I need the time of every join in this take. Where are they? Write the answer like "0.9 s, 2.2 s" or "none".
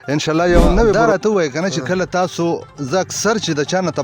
0.9 s